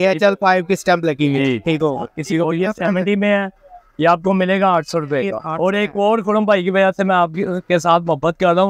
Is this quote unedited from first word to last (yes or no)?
yes